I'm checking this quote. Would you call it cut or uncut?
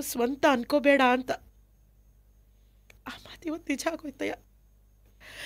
uncut